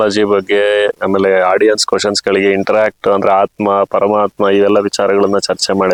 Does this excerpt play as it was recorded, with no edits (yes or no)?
yes